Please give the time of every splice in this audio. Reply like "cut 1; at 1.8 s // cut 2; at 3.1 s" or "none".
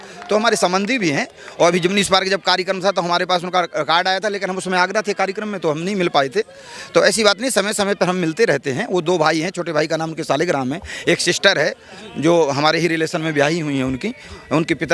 none